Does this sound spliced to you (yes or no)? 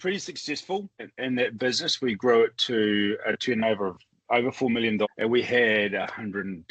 yes